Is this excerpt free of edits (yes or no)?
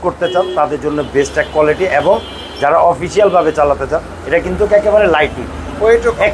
yes